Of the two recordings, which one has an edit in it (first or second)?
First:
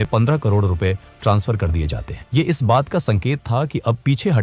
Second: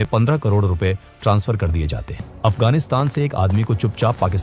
second